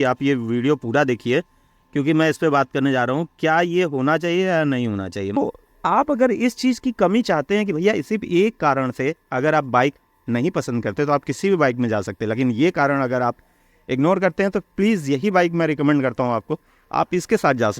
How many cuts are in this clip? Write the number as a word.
one